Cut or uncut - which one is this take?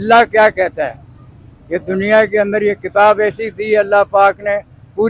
uncut